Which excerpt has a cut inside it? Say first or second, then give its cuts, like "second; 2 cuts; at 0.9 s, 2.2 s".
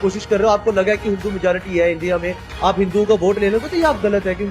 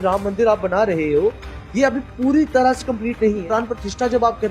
second; 1 cut; at 3.4 s